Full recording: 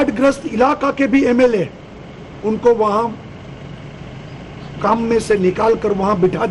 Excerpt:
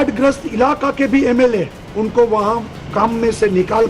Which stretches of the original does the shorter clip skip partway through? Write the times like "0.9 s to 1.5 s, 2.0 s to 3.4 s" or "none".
1.8 s to 2.3 s, 3.2 s to 4.6 s